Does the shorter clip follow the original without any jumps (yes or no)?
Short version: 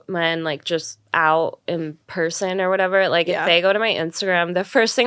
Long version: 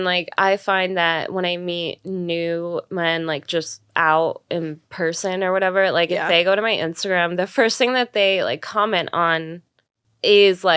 yes